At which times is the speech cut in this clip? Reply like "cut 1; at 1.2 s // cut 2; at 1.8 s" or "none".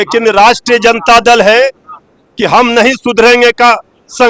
none

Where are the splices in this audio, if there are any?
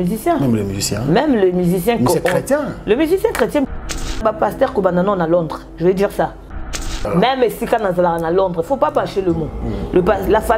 cut 1; at 4.2 s // cut 2; at 6.8 s

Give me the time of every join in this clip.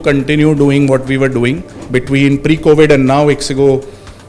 cut 1; at 1.7 s

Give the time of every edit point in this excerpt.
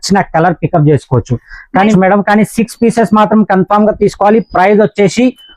cut 1; at 1.9 s

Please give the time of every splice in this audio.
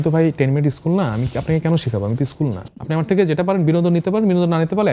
cut 1; at 2.8 s

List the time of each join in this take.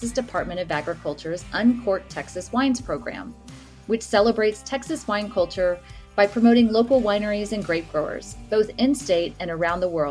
none

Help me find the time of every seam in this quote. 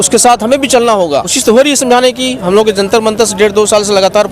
cut 1; at 1.4 s

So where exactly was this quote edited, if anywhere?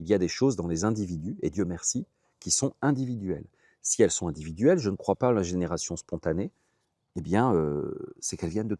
none

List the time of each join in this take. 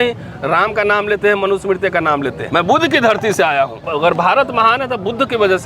cut 1; at 2.4 s // cut 2; at 3.9 s

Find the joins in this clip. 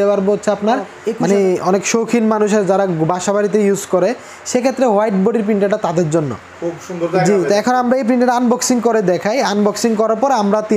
cut 1; at 1.0 s

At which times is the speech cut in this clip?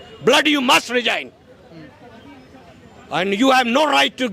none

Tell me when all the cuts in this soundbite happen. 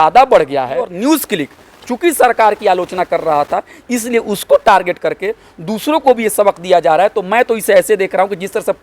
cut 1; at 0.9 s

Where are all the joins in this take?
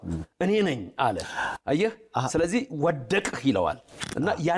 none

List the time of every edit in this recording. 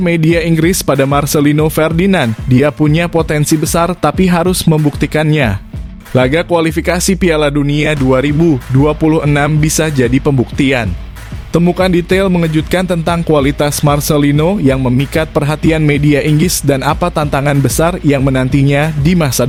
none

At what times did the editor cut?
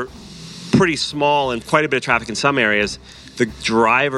cut 1; at 1.6 s

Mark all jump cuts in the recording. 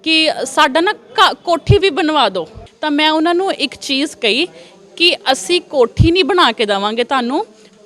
cut 1; at 2.6 s

